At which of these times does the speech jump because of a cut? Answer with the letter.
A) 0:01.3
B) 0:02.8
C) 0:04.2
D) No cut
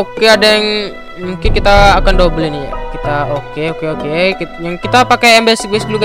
D